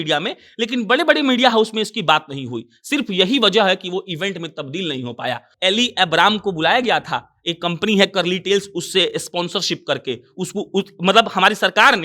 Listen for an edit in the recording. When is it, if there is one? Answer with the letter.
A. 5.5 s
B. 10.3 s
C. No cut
A